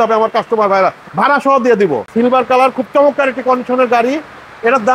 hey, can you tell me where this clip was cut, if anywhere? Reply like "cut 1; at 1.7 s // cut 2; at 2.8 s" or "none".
cut 1; at 2.1 s

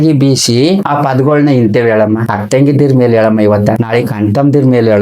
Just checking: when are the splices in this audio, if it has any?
cut 1; at 0.9 s // cut 2; at 2.3 s // cut 3; at 3.8 s

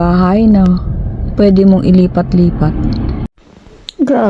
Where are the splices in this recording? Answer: cut 1; at 3.2 s

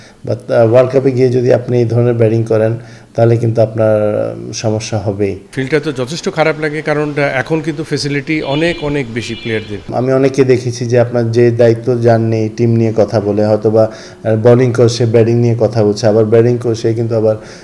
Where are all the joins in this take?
cut 1; at 5.4 s // cut 2; at 9.8 s

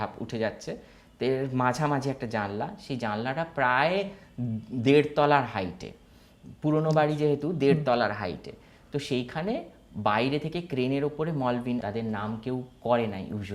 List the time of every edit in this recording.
cut 1; at 11.8 s

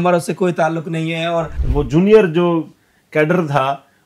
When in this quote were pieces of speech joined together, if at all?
cut 1; at 1.6 s

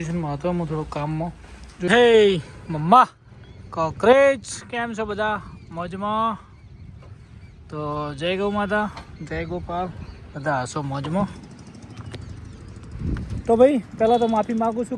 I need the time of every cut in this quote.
cut 1; at 1.9 s

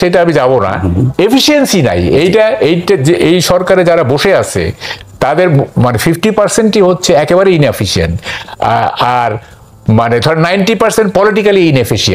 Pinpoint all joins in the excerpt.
none

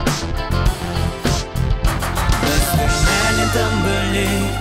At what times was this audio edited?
none

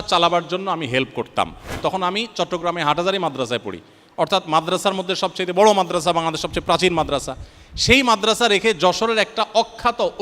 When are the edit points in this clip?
cut 1; at 1.8 s

